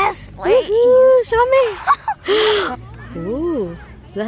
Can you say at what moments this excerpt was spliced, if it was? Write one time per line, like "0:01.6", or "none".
0:02.7